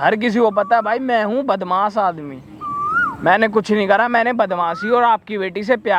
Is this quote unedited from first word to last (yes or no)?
yes